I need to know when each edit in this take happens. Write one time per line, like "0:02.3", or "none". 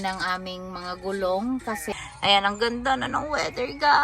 0:01.8